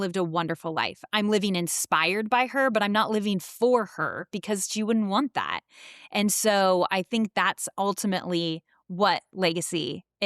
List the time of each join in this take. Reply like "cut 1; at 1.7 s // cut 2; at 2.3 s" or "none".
none